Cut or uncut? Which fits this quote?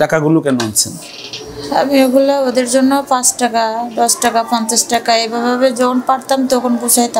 uncut